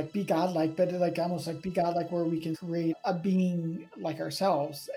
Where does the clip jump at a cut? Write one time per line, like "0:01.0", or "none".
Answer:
0:02.5